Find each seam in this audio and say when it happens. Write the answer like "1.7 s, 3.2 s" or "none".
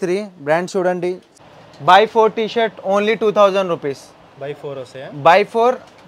1.3 s